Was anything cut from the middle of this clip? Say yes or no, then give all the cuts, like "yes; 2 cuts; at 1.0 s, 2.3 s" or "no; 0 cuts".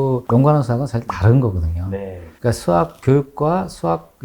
yes; 1 cut; at 2.3 s